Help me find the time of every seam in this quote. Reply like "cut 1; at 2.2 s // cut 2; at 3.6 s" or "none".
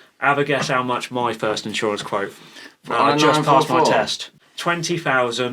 cut 1; at 4.4 s